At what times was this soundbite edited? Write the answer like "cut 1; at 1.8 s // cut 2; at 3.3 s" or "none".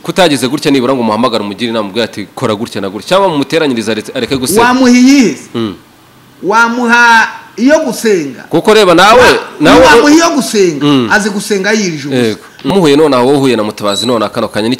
cut 1; at 12.7 s